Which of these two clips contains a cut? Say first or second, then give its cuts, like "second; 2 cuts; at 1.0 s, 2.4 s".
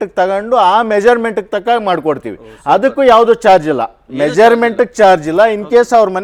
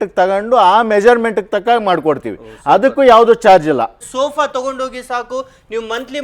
second; 1 cut; at 4.0 s